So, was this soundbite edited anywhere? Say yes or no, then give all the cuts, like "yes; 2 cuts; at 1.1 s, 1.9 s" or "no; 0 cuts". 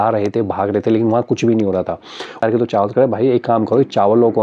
yes; 1 cut; at 2.4 s